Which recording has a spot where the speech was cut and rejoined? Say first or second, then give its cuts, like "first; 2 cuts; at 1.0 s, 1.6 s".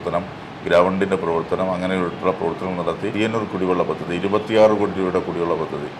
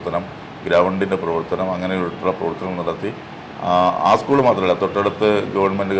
first; 1 cut; at 3.1 s